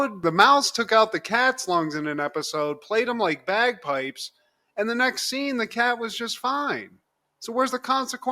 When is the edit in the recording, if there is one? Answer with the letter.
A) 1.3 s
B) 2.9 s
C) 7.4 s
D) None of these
D